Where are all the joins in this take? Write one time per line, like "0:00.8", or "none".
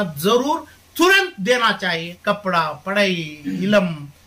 0:02.1